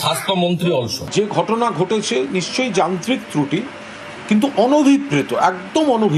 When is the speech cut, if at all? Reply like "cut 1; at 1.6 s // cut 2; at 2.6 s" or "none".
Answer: cut 1; at 1.0 s